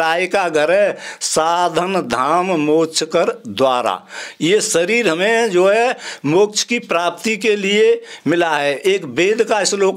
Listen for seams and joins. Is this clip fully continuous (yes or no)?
yes